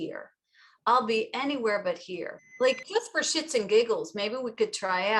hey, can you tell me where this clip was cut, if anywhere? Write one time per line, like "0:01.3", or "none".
0:02.4